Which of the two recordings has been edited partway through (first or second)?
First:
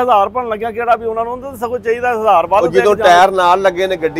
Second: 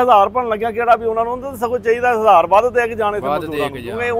first